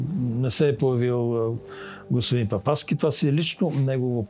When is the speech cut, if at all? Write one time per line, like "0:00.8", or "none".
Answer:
none